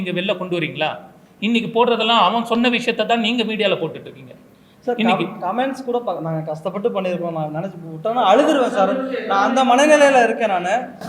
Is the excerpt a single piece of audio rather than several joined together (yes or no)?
yes